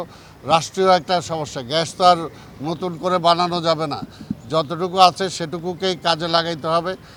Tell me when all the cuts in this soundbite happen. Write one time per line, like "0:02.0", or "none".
none